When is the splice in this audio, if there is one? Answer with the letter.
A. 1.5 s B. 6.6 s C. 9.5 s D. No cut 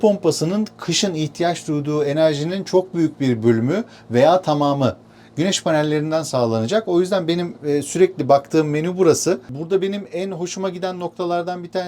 C